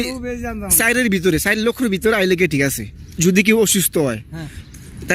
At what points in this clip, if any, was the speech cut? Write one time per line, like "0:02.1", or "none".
0:03.1